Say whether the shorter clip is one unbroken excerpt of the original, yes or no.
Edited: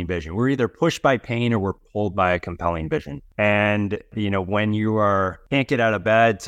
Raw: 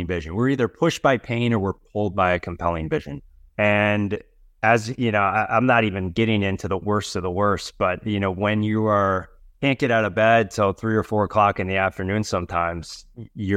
no